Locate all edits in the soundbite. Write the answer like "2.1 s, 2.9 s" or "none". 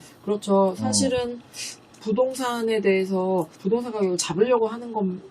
3.5 s